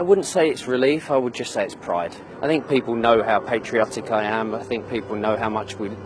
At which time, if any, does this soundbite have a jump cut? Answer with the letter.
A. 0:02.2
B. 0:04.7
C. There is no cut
A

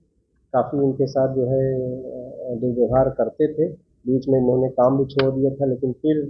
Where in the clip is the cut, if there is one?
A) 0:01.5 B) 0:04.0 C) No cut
C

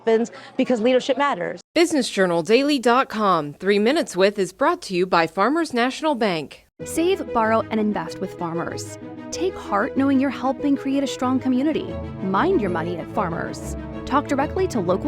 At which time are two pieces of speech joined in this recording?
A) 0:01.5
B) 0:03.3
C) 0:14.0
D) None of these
A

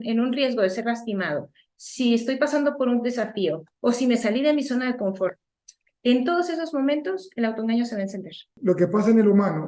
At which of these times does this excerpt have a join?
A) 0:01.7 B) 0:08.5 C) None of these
B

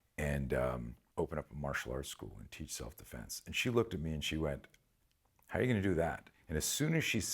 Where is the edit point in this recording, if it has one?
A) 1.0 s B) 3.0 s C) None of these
A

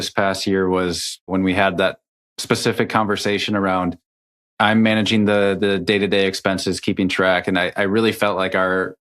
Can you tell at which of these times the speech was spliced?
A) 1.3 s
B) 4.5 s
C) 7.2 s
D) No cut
A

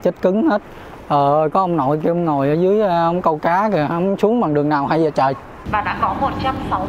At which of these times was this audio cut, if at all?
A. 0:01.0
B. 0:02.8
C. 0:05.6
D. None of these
C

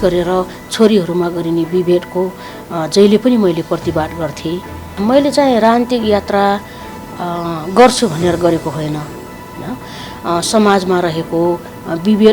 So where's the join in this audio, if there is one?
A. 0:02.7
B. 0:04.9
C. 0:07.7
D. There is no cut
B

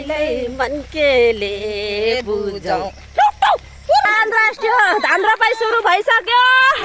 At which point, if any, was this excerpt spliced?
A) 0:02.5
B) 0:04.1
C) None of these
B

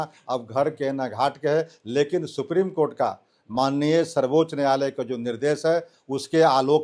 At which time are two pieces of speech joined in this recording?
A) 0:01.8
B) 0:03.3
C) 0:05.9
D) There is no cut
D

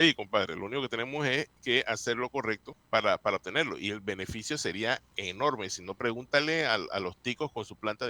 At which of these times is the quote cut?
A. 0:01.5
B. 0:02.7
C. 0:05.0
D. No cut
B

